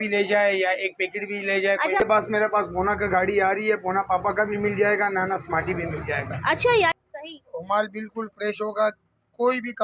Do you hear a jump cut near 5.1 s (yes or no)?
no